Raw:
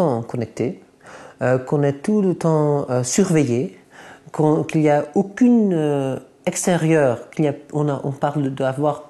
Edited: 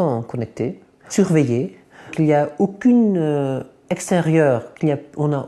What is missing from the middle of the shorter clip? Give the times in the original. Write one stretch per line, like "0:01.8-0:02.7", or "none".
0:01.1-0:03.1
0:04.1-0:04.7